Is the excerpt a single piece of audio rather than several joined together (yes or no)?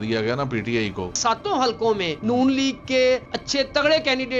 no